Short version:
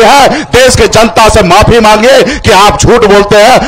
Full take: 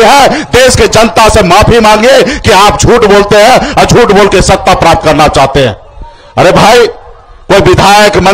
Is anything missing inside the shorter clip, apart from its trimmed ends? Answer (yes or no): no